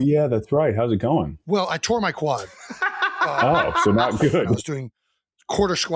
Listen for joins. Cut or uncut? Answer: cut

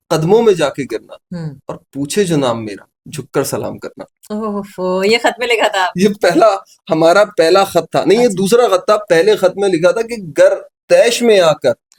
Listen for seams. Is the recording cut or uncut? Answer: uncut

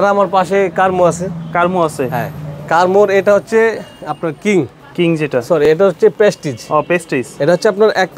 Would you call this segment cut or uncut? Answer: uncut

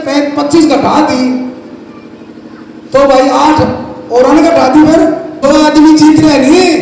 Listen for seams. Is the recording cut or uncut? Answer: cut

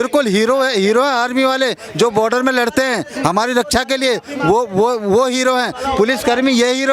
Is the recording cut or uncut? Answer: uncut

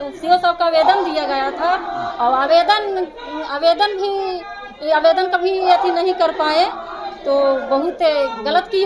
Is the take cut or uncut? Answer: uncut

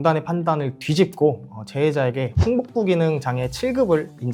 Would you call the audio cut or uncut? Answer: uncut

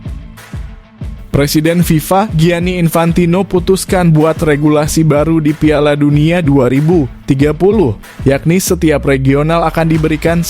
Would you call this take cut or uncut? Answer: cut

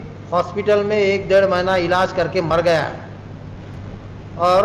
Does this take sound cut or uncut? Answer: uncut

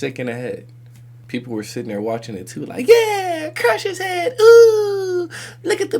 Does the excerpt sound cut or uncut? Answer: cut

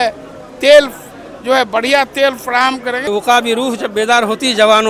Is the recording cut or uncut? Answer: cut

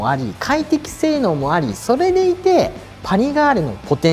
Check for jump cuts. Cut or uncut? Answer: uncut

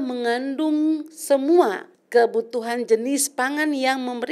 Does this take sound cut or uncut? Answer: cut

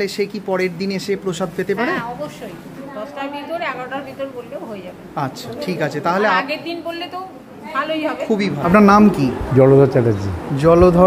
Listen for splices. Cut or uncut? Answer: cut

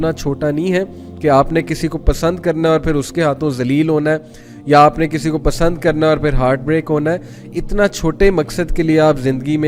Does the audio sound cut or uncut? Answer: uncut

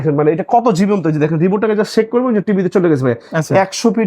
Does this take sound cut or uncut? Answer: uncut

